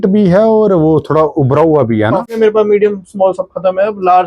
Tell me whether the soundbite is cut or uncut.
cut